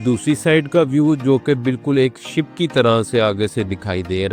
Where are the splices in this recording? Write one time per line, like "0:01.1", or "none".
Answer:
none